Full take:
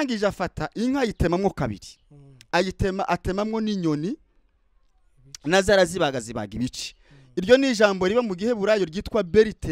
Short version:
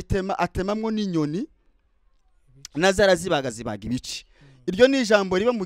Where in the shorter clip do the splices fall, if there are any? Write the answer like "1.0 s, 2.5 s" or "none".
none

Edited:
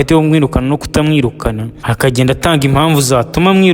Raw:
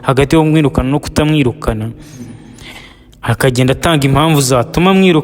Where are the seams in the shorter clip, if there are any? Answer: 1.7 s

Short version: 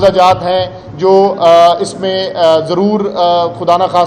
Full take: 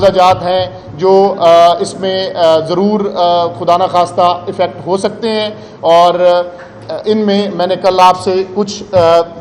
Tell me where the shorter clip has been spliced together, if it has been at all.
none

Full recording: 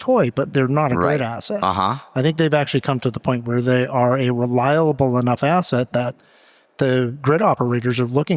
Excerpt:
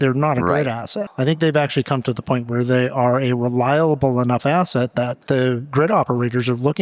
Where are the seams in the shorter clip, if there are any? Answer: 1.0 s, 5.2 s

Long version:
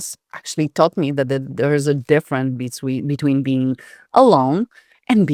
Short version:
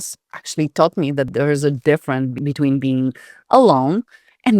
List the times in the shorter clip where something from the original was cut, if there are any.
1.3 s, 2.4 s

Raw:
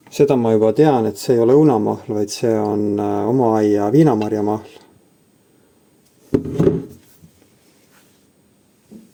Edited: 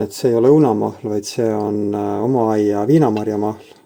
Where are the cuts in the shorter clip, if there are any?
none

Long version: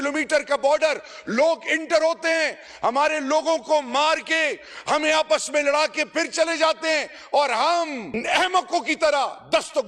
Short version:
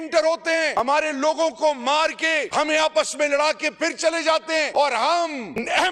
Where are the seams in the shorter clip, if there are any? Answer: 0.8 s, 2.5 s, 4.7 s

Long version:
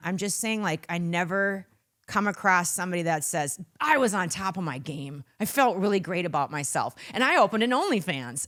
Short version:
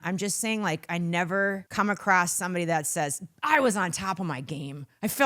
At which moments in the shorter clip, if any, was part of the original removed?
1.6 s

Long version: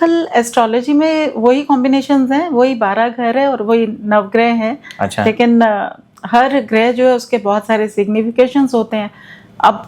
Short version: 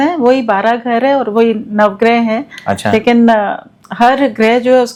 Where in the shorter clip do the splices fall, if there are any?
none

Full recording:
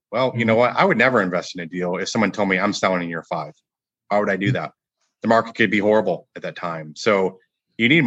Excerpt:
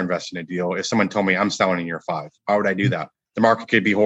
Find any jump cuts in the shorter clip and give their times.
2.3 s, 3.2 s

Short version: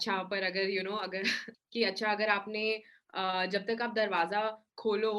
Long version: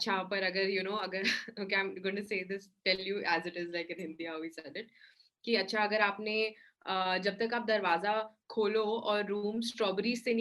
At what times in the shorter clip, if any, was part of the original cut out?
1.4 s

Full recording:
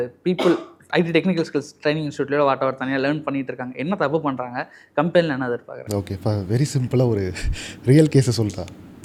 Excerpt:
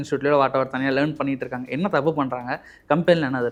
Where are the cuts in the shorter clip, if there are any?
none

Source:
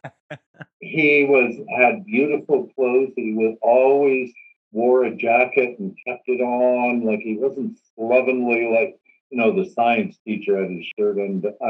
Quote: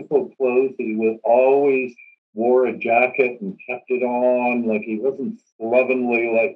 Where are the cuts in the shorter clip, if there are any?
none

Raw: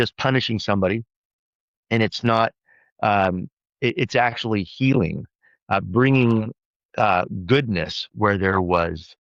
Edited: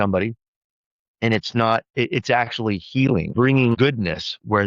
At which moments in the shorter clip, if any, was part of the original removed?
1.9 s, 3.7 s

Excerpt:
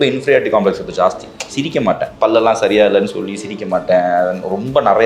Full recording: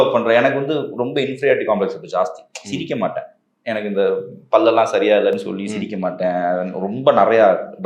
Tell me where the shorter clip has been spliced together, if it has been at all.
2.1 s

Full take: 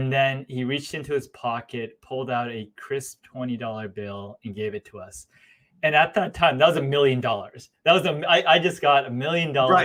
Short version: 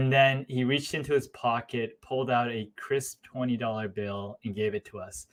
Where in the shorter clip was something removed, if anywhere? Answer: none

